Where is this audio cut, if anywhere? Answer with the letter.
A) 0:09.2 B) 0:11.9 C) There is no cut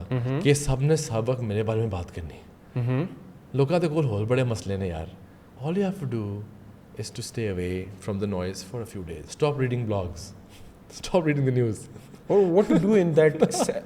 A